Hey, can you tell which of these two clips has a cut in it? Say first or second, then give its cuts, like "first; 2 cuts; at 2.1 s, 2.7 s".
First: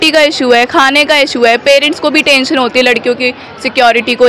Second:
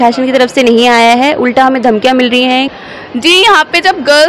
second; 1 cut; at 2.7 s